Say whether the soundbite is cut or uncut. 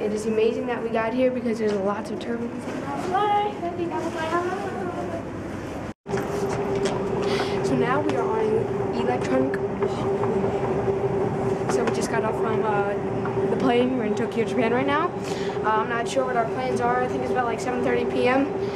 uncut